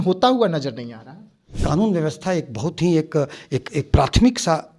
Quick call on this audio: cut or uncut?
cut